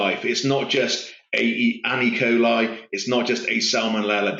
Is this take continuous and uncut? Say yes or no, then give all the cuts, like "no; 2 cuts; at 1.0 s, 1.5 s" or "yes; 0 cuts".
yes; 0 cuts